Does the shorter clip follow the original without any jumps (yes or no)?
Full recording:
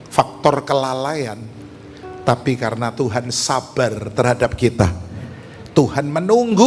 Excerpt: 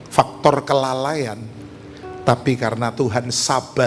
yes